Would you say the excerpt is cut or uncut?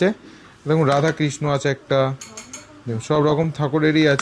uncut